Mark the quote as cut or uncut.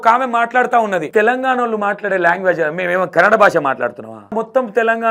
cut